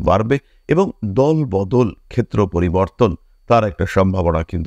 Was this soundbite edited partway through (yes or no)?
no